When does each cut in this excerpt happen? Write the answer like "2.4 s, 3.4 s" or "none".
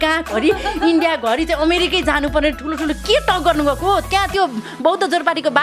none